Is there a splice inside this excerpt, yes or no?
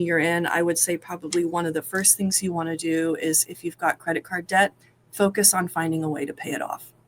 no